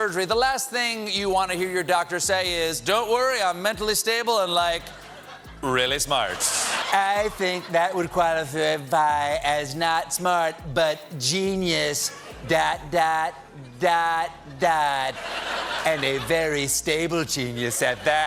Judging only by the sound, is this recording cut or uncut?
cut